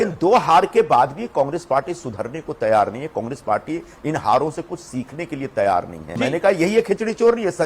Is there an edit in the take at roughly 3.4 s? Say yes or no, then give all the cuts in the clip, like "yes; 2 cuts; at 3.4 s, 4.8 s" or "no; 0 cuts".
no; 1 cut; at 6.0 s